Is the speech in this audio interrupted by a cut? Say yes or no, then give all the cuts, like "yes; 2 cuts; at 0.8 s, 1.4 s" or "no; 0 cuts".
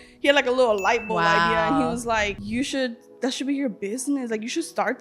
yes; 1 cut; at 2.4 s